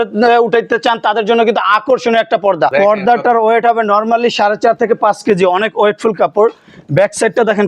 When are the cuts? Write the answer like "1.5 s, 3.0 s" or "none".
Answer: 2.7 s